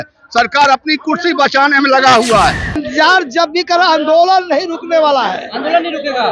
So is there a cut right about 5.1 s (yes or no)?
no